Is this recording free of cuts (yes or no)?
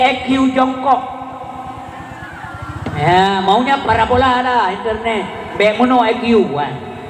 yes